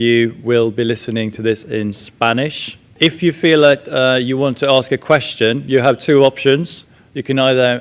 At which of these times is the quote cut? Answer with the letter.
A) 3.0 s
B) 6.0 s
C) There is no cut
A